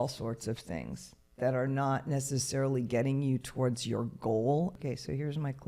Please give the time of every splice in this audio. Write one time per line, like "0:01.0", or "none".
0:04.8

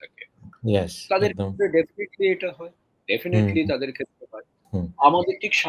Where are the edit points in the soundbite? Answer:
0:04.6

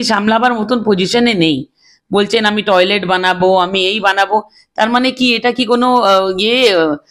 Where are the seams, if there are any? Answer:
none

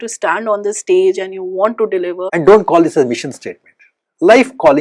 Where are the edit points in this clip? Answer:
0:02.2

